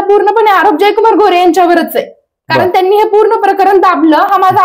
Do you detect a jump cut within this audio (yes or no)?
no